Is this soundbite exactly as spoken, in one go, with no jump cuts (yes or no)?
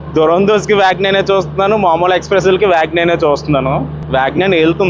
no